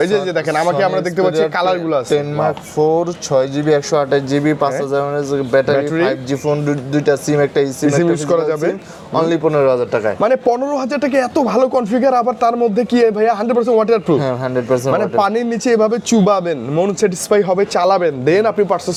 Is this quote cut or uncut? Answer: uncut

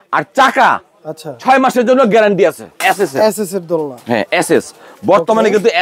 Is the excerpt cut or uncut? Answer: cut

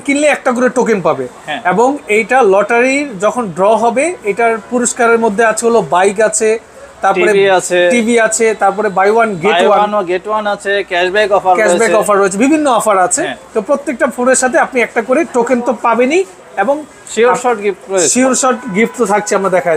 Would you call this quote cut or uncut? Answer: uncut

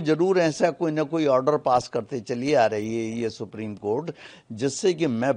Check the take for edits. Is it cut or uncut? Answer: uncut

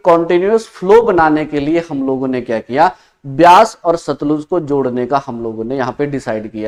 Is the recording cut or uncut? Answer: uncut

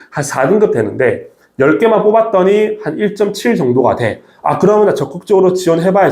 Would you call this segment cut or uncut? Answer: uncut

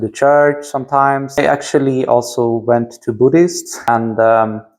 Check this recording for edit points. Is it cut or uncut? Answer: cut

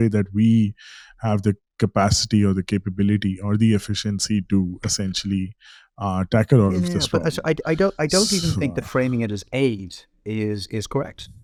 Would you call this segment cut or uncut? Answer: uncut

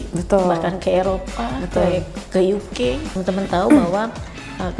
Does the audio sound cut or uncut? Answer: cut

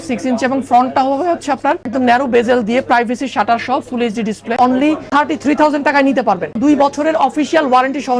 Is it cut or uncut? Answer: cut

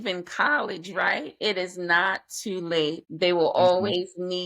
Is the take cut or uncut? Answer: cut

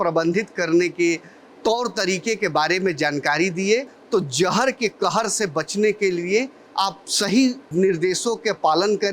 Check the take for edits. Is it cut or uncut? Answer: cut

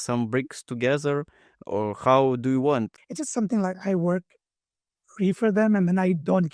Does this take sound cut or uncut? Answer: cut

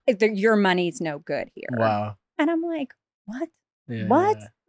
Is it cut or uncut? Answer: cut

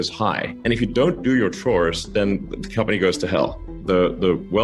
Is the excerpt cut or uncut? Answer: cut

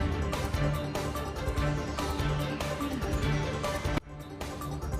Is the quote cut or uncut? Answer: cut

